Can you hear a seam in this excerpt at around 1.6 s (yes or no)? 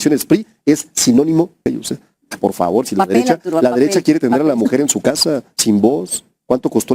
yes